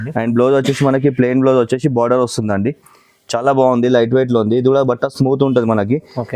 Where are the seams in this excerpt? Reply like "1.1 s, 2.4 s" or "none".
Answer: none